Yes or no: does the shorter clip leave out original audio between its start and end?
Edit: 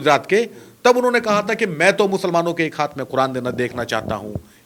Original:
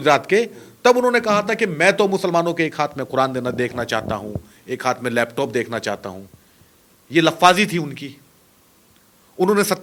no